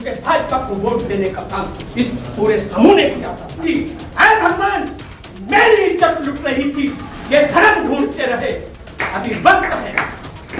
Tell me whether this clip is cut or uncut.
cut